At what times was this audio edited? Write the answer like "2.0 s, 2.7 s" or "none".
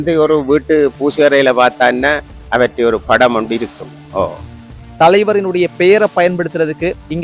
4.7 s